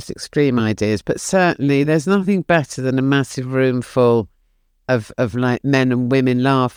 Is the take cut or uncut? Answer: uncut